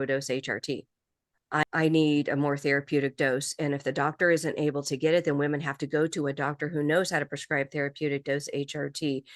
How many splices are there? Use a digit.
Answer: 1